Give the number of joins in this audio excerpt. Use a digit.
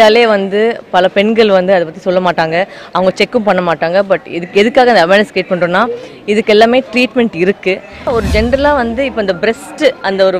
1